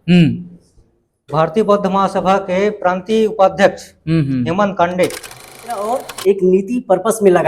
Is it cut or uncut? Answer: cut